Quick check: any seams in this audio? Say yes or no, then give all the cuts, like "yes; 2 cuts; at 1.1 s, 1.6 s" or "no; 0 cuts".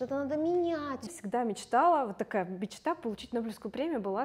yes; 1 cut; at 1.1 s